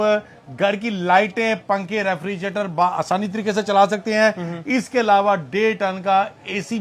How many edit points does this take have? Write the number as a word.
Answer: zero